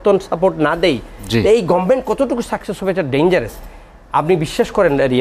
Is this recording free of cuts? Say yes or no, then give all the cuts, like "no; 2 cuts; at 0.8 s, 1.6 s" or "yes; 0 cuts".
yes; 0 cuts